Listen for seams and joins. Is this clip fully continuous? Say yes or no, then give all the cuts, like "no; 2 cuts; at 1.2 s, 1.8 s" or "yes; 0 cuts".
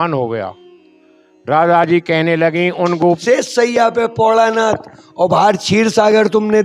no; 1 cut; at 3.2 s